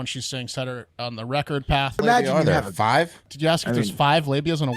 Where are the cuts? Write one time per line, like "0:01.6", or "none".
0:02.0
0:03.3